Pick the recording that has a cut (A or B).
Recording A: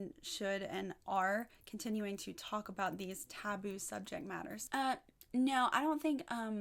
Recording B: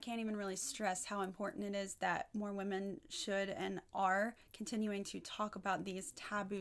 A